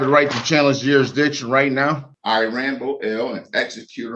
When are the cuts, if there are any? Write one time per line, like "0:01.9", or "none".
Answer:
0:02.1